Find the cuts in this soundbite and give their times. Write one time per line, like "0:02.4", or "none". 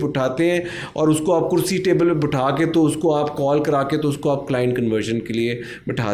none

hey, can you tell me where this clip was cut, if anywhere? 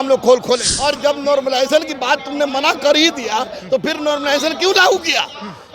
0:01.0

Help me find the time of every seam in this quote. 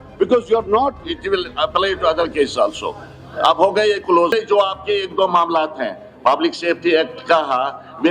0:04.3

